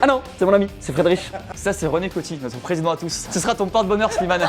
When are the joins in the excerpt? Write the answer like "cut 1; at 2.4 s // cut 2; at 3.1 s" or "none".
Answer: cut 1; at 1.5 s